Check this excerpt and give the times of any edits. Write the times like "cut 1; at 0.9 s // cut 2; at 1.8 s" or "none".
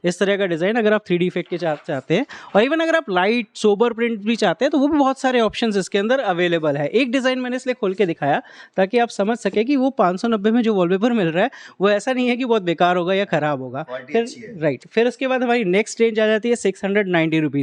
none